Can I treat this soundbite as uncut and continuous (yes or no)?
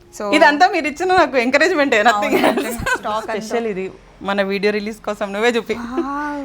no